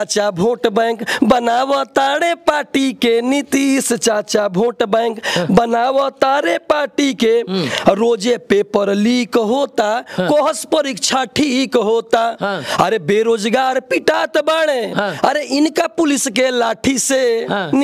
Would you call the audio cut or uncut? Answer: uncut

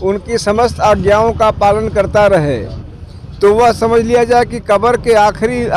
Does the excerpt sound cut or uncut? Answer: uncut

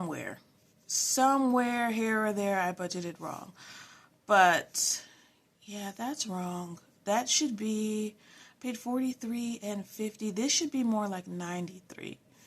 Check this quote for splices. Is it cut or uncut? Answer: uncut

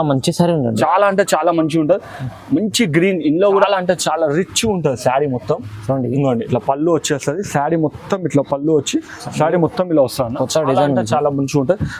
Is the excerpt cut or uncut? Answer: cut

